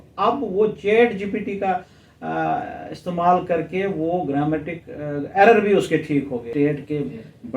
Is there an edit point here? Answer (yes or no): yes